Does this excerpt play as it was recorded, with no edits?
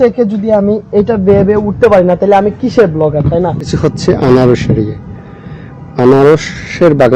no; 1 cut; at 3.7 s

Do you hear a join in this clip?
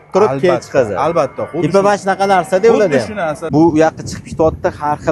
yes; 1 cut; at 3.4 s

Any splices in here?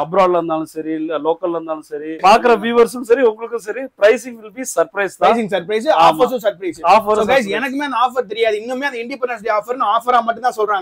yes; 1 cut; at 2.1 s

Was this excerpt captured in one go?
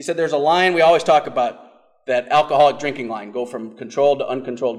yes; 0 cuts

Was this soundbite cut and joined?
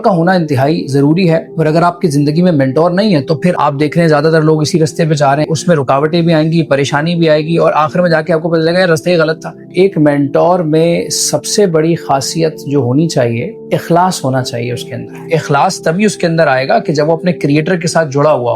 yes; 6 cuts; at 1.5 s, 3.5 s, 5.4 s, 9.7 s, 13.6 s, 15.2 s

